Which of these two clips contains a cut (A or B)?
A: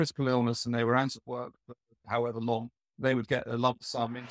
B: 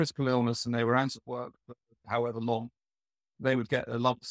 A